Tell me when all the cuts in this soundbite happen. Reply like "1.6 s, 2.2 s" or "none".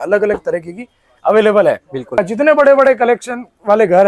2.2 s